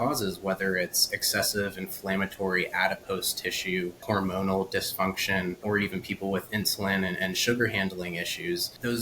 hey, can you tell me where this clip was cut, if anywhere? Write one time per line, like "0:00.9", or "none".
0:04.0
0:05.6